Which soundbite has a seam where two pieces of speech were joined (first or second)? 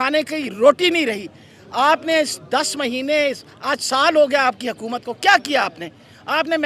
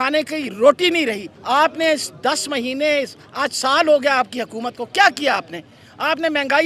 second